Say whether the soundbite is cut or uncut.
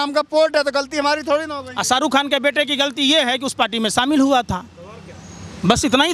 uncut